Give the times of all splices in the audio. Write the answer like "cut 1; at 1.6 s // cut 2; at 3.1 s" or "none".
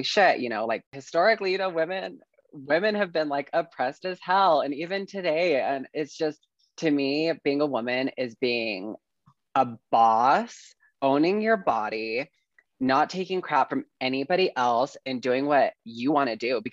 cut 1; at 1.0 s